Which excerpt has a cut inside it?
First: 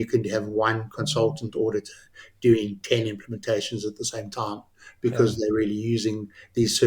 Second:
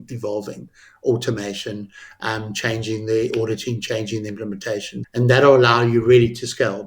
second; 1 cut; at 5.0 s

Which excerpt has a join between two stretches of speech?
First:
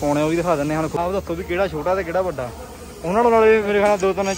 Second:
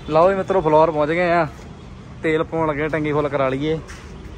first; 1 cut; at 1.0 s

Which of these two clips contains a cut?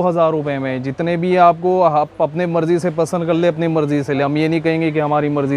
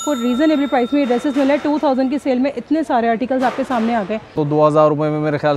second; 1 cut; at 4.4 s

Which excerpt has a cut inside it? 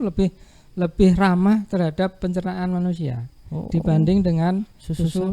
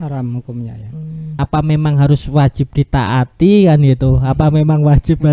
second; 1 cut; at 1.3 s

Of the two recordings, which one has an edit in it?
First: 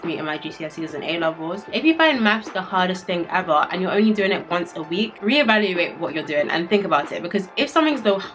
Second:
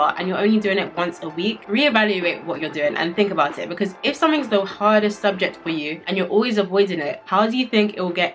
first; 1 cut; at 1.6 s

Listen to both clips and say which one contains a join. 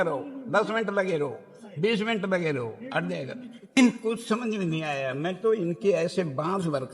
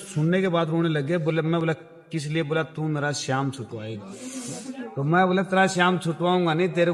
first; 1 cut; at 3.8 s

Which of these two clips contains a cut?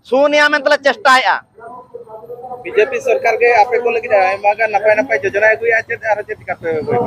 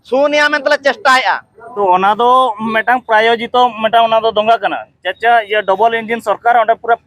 second; 1 cut; at 1.8 s

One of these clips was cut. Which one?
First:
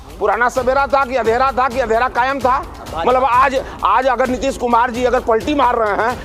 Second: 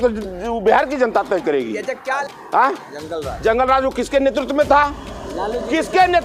second; 1 cut; at 2.2 s

